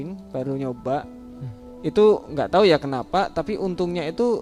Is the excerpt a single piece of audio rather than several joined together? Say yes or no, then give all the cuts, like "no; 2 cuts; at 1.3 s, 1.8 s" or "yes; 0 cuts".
yes; 0 cuts